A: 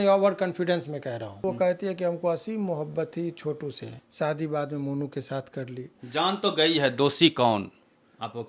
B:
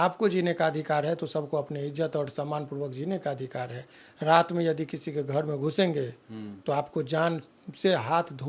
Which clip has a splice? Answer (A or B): A